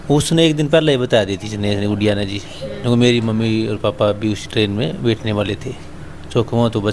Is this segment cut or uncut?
uncut